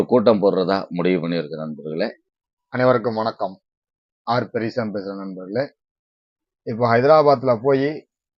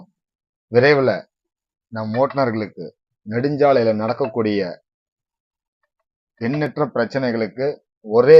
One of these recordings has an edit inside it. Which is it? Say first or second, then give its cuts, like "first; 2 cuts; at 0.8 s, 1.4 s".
first; 1 cut; at 2.3 s